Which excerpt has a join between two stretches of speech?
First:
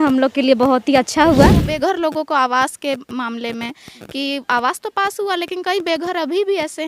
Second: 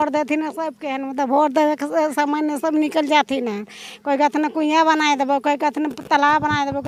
first; 1 cut; at 1.7 s

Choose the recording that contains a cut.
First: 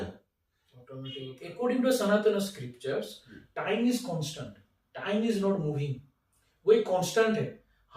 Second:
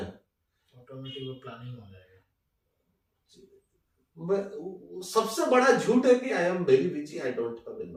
first; 1 cut; at 1.4 s

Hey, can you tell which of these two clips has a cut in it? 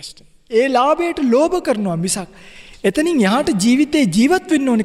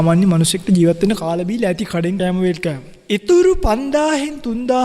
second; 2 cuts; at 2.2 s, 2.9 s

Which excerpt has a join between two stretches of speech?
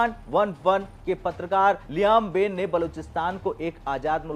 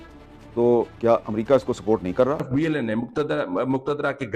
second; 1 cut; at 2.4 s

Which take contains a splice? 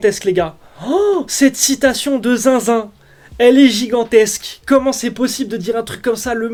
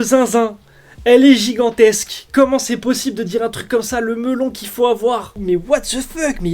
second; 1 cut; at 5.3 s

